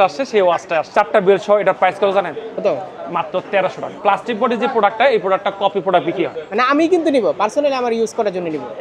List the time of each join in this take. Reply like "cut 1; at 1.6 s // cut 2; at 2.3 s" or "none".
cut 1; at 0.9 s // cut 2; at 3.9 s // cut 3; at 6.4 s